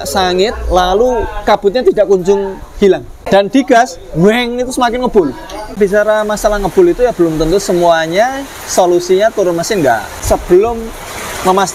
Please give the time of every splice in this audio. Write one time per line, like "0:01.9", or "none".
0:03.2
0:05.8
0:10.2